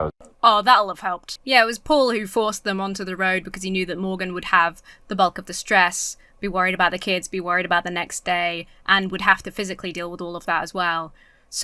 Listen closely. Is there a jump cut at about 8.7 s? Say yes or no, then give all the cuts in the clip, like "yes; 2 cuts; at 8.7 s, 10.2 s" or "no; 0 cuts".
no; 0 cuts